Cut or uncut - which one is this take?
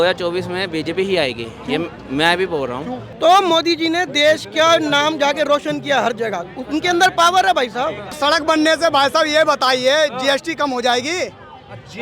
cut